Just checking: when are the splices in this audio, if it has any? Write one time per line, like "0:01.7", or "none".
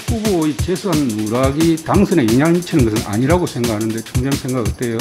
none